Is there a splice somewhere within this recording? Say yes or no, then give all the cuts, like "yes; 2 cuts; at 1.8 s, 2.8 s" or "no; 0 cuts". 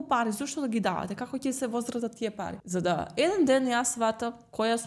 yes; 1 cut; at 2.6 s